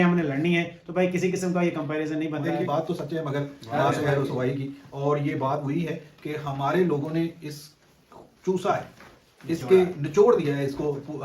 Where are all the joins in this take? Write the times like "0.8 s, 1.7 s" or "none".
2.5 s